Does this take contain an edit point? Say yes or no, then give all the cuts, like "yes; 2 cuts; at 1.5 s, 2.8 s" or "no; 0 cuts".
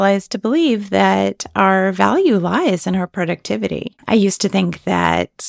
yes; 1 cut; at 3.9 s